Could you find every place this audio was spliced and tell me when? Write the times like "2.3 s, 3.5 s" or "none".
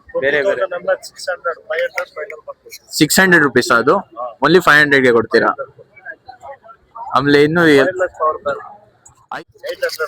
9.1 s